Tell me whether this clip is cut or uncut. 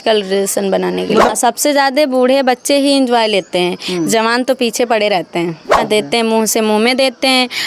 cut